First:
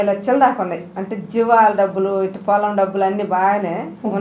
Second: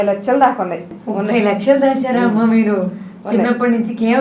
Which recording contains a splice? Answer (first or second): second